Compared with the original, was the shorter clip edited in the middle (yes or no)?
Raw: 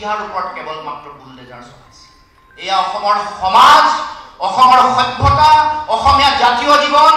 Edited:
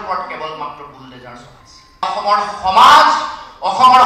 yes